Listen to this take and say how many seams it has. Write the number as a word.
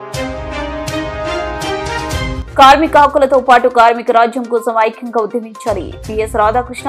one